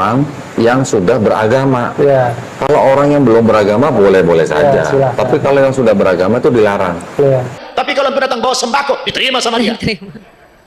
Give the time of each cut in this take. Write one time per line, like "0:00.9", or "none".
0:02.4
0:07.6